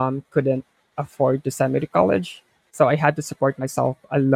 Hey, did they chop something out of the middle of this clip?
no; 0 cuts

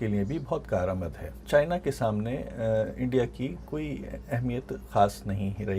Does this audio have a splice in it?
yes; 1 cut; at 1.3 s

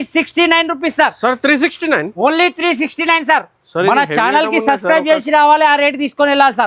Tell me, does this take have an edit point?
no; 0 cuts

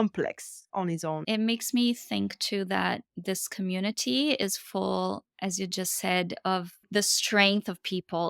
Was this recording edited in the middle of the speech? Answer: yes; 1 cut; at 1.2 s

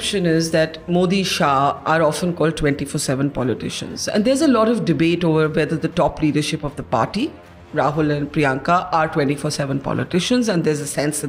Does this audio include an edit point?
no; 0 cuts

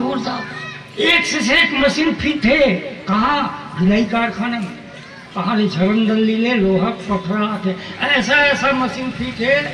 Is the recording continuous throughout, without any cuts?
yes; 0 cuts

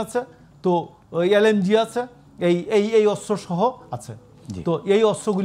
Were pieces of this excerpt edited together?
no; 0 cuts

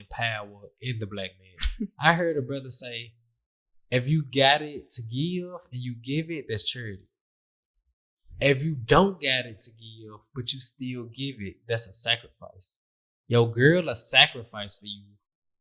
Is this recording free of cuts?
no; 1 cut; at 1.9 s

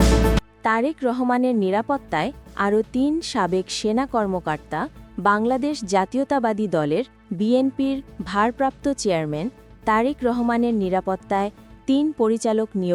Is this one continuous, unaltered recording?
yes; 0 cuts

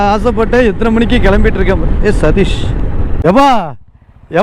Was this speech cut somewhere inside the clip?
yes; 1 cut; at 3.0 s

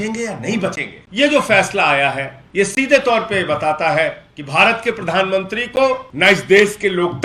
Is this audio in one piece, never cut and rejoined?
no; 4 cuts; at 0.9 s, 2.3 s, 4.3 s, 6.1 s

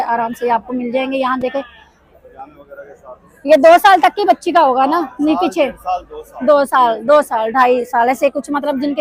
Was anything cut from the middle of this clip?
no; 0 cuts

